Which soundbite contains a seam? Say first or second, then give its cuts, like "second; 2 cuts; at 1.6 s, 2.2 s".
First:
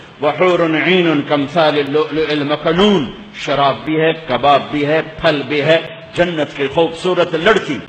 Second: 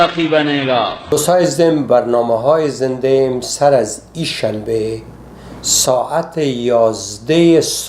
second; 1 cut; at 1.0 s